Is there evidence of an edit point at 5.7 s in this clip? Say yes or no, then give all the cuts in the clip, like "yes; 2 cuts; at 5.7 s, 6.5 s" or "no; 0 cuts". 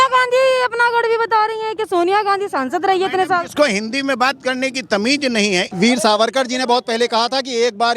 yes; 1 cut; at 5.7 s